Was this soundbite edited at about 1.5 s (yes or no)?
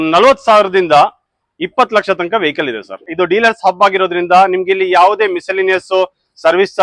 no